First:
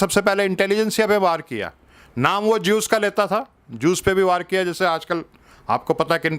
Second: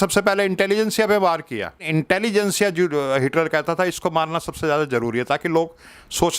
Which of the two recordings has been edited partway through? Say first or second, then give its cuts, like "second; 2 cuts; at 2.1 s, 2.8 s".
second; 1 cut; at 1.9 s